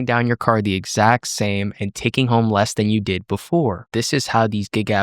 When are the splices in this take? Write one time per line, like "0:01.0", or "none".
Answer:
0:03.9

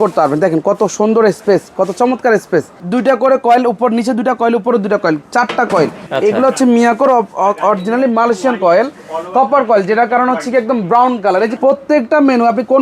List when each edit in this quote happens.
0:02.8
0:06.0
0:11.5

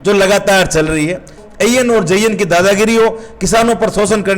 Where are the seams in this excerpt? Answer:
0:01.4

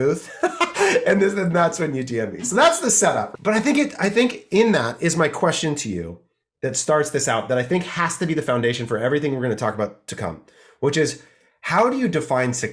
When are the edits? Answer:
0:03.3

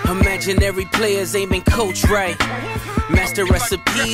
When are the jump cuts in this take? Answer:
none

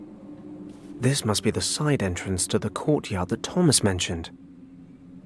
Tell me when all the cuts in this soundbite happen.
0:00.7
0:04.3

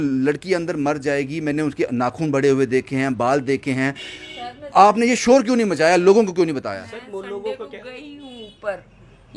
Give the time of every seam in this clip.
none

